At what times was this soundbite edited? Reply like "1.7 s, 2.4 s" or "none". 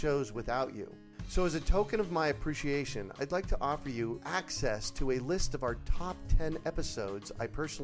none